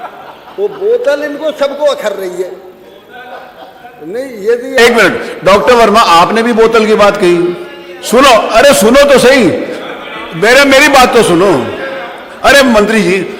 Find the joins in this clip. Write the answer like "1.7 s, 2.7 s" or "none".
4.8 s